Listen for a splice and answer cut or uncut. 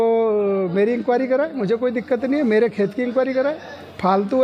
uncut